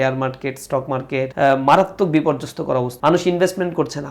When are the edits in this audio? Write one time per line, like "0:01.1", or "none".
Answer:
0:01.3
0:02.9